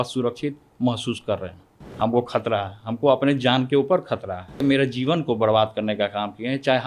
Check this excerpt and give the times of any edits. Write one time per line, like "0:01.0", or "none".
0:01.8
0:04.6